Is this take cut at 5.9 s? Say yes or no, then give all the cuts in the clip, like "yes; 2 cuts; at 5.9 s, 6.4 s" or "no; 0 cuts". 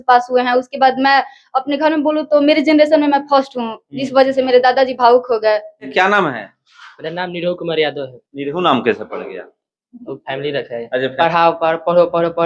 yes; 2 cuts; at 5.9 s, 11.1 s